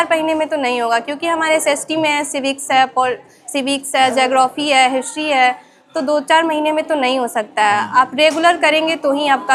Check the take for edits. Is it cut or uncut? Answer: uncut